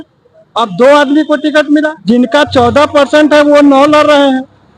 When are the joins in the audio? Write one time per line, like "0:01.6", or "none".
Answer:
0:02.0